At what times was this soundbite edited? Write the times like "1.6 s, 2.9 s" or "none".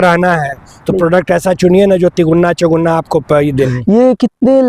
3.7 s